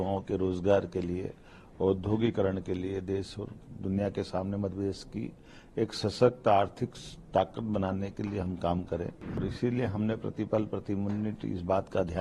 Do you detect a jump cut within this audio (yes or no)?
yes